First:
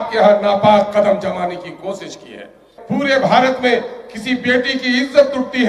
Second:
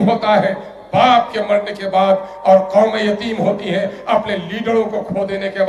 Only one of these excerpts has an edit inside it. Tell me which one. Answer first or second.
first